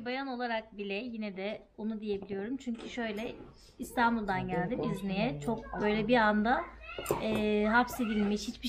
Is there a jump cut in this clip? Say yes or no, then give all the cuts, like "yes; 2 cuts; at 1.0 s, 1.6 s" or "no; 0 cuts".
no; 0 cuts